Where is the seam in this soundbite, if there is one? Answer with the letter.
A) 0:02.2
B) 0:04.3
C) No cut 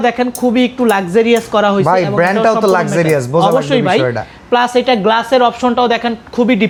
C